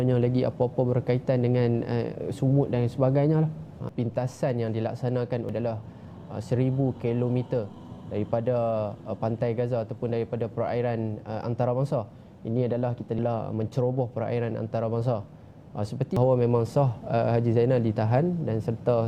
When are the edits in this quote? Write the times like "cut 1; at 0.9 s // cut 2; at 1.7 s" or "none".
cut 1; at 3.8 s // cut 2; at 5.5 s // cut 3; at 13.2 s // cut 4; at 16.2 s